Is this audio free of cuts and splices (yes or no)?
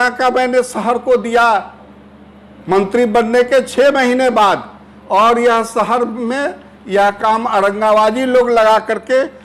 yes